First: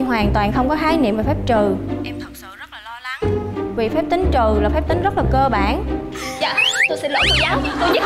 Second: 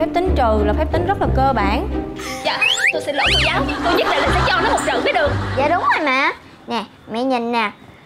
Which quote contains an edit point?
second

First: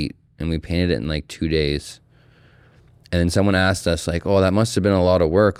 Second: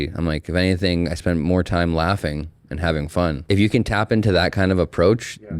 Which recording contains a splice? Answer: second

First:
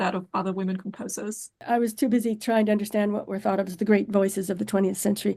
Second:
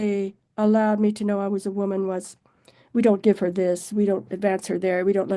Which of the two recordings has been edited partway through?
first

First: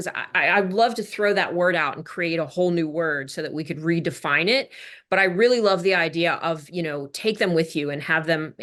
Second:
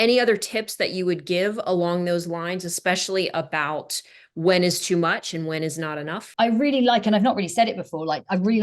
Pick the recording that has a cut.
second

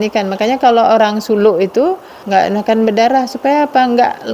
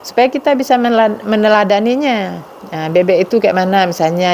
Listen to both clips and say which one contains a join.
first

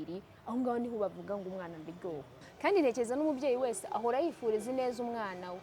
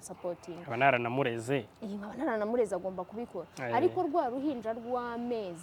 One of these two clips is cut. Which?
first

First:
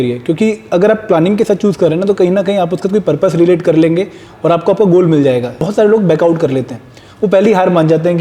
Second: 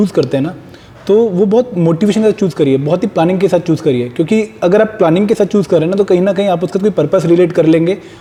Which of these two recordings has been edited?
first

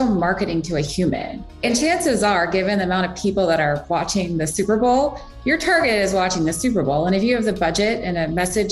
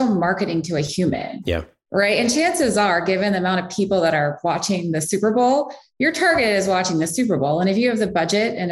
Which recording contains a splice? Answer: first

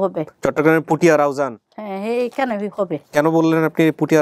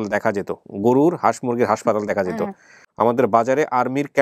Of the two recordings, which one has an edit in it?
second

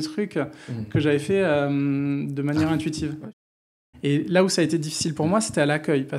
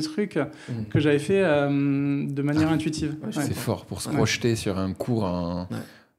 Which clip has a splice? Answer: first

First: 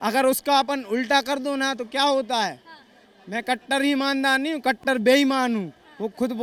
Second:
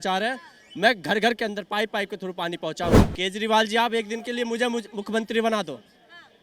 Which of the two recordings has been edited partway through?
second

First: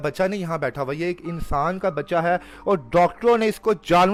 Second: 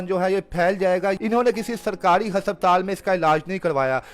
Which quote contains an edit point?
second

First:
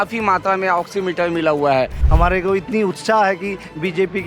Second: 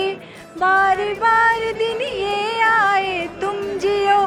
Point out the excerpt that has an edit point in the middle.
first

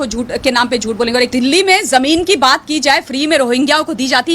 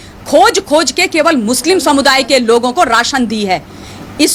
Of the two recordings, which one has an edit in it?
first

